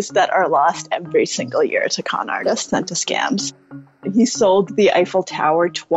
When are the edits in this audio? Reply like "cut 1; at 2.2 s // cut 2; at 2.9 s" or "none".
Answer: cut 1; at 4.0 s

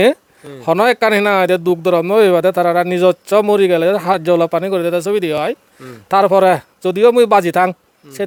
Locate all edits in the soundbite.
none

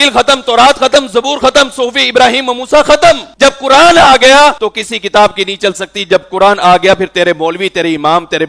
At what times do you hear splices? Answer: cut 1; at 3.3 s // cut 2; at 4.6 s

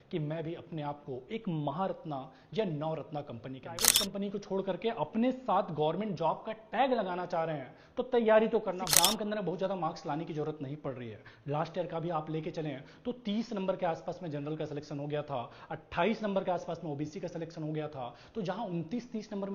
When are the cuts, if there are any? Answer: cut 1; at 3.9 s // cut 2; at 8.8 s

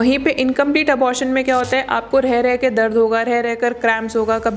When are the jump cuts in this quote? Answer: none

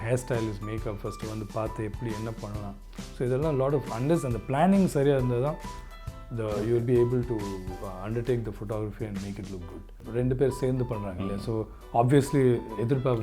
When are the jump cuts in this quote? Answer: cut 1; at 10.0 s

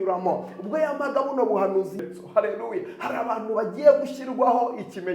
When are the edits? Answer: cut 1; at 2.0 s

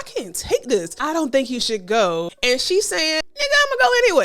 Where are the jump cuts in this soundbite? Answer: cut 1; at 1.0 s // cut 2; at 2.3 s // cut 3; at 3.3 s

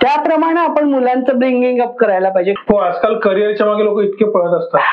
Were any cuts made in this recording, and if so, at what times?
cut 1; at 2.6 s

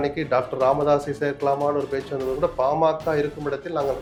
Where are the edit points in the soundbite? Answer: none

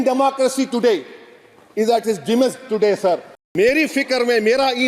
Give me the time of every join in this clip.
cut 1; at 3.3 s

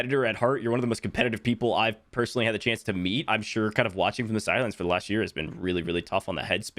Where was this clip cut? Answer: cut 1; at 3.3 s

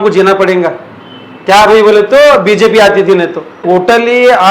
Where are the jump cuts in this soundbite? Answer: cut 1; at 3.6 s

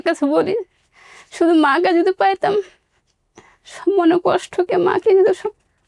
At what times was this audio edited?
none

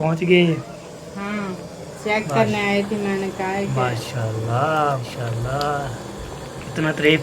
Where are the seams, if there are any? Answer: cut 1; at 5.1 s

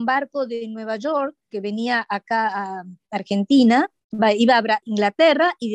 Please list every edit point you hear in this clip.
cut 1; at 4.8 s

